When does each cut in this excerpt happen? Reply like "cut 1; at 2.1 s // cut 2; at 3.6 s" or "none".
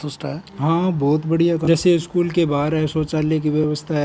cut 1; at 1.6 s